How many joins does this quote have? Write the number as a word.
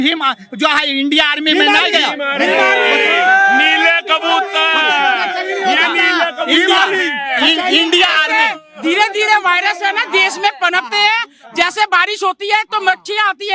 zero